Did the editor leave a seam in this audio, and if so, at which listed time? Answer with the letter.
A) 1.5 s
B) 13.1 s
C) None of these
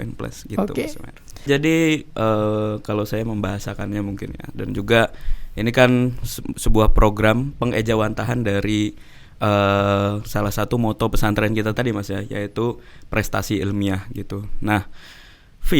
A